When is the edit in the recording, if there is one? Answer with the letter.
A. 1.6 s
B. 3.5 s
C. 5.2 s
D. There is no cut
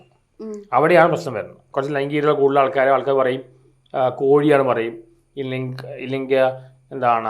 A